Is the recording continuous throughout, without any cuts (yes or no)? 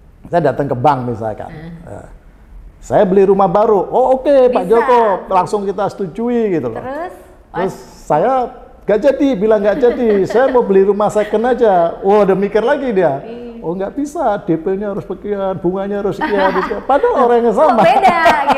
yes